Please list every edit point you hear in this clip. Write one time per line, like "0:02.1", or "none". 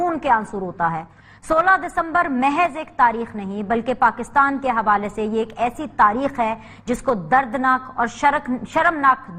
0:01.1